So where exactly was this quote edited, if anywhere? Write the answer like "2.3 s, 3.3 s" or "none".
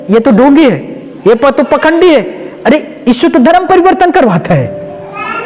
none